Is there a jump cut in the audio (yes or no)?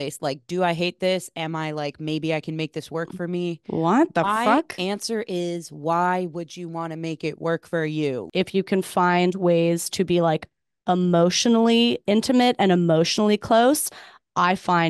yes